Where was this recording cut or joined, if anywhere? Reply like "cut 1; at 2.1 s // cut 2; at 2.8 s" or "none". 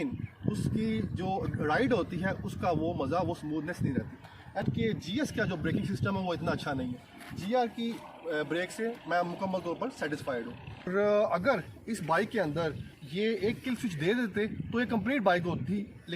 cut 1; at 4.6 s // cut 2; at 10.9 s